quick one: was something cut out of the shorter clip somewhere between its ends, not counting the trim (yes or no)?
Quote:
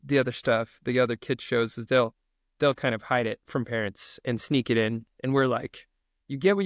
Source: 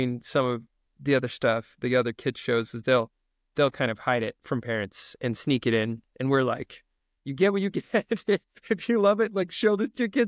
no